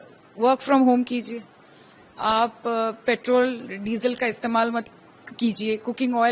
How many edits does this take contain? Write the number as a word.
zero